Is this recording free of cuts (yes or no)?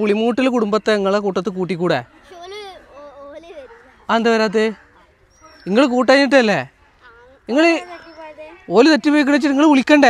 yes